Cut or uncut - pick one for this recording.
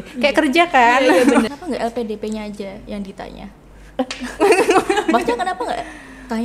cut